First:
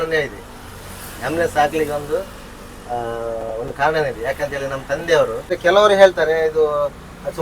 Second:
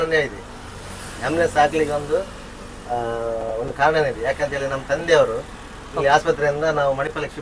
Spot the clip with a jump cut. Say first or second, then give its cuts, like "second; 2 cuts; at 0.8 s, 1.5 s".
first; 1 cut; at 5.5 s